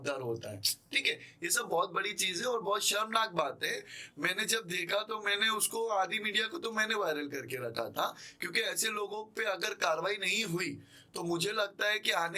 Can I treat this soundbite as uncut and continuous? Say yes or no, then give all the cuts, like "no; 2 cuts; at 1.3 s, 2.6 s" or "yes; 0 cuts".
yes; 0 cuts